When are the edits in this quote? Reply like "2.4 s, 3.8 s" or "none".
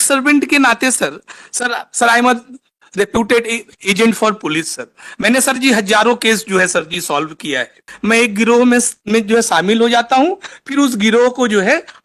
7.9 s